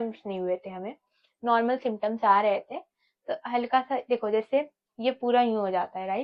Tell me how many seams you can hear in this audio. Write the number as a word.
zero